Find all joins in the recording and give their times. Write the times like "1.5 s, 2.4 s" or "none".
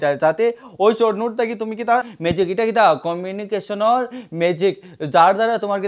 2.1 s